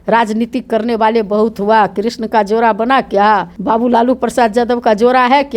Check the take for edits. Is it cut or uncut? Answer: cut